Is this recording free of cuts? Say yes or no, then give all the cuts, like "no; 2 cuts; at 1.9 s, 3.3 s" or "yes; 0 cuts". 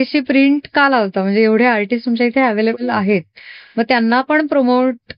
yes; 0 cuts